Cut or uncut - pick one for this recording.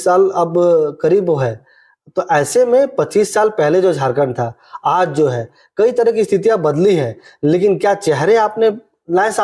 uncut